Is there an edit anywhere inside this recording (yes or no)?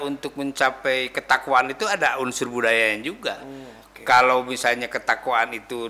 no